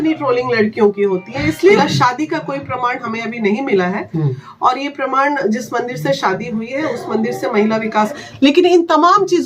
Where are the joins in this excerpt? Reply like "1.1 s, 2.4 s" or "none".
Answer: 1.8 s, 8.2 s